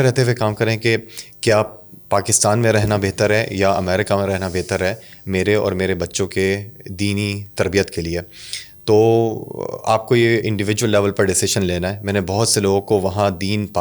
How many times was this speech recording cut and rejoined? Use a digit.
0